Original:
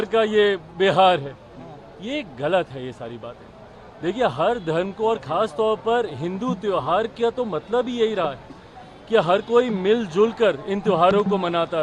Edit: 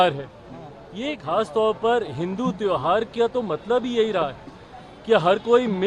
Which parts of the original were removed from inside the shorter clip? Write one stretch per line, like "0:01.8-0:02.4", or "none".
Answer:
0:02.3-0:05.2